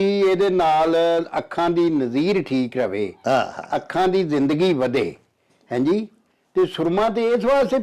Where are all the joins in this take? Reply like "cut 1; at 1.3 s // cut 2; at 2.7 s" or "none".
none